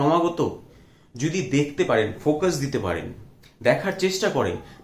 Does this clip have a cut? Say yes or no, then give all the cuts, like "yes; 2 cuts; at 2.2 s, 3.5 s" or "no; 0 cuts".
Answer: no; 0 cuts